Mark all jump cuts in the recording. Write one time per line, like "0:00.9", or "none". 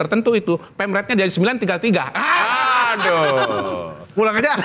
none